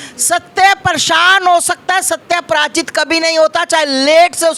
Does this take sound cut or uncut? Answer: uncut